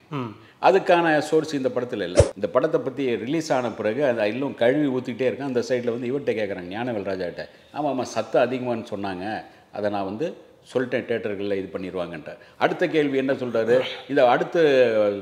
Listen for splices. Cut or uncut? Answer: cut